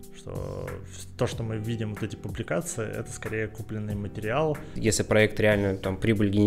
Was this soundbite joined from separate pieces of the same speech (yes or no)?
yes